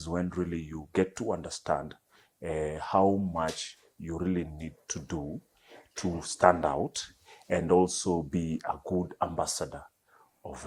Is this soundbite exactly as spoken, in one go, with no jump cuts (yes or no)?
yes